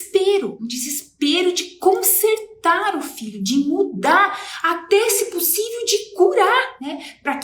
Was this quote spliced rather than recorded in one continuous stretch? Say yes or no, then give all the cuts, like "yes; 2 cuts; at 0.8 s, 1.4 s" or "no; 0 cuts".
no; 0 cuts